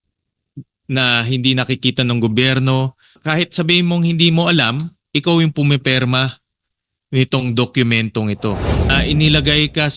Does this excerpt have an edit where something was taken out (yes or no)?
yes